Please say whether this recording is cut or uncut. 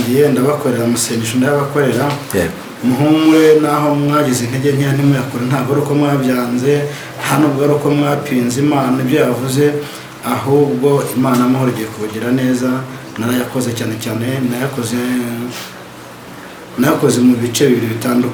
uncut